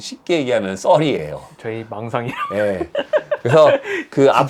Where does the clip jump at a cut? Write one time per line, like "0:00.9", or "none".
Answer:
none

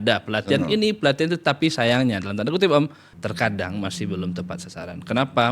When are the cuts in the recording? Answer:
0:03.1

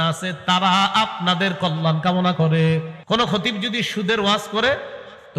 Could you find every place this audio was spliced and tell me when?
0:02.9

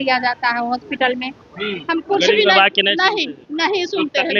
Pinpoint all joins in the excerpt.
0:01.9

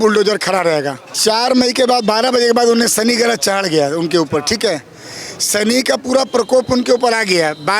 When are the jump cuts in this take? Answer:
0:01.0

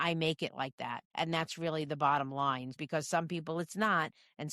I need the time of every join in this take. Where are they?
0:01.0
0:02.8

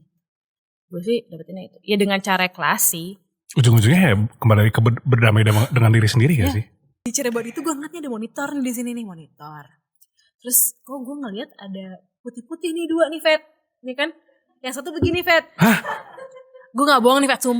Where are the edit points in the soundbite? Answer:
0:07.1

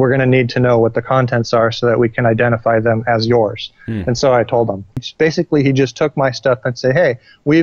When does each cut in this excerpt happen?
0:05.1

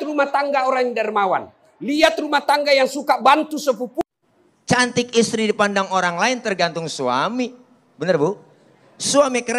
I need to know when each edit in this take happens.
0:04.0

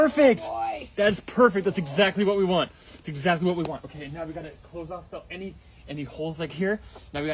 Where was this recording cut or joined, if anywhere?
none

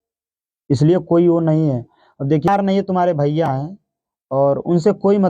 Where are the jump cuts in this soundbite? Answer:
0:02.5

